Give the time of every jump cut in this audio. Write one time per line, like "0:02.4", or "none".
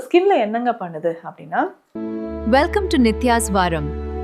0:01.8